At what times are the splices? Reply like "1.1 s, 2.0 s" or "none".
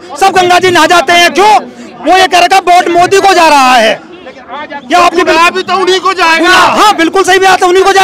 none